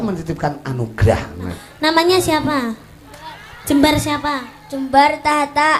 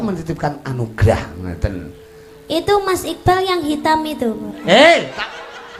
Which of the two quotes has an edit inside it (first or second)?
first